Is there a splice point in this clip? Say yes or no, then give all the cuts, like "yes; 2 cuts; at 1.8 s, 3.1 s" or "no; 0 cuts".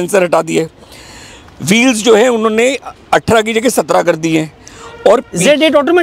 no; 0 cuts